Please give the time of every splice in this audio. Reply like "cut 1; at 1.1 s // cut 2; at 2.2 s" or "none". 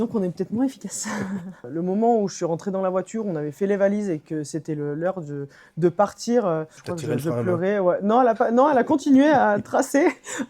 cut 1; at 1.7 s // cut 2; at 6.8 s